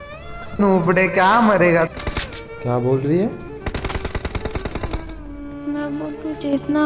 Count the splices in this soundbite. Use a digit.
1